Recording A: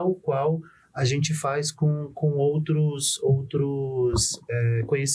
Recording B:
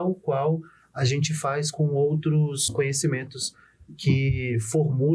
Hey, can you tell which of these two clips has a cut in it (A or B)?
B